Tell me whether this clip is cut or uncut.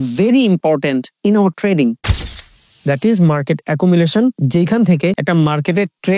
cut